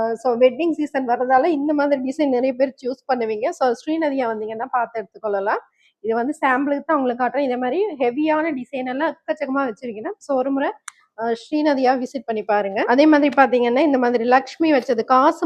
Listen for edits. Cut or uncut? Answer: uncut